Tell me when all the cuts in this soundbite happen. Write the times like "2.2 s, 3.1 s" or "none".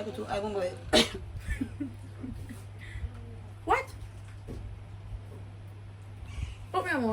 5.1 s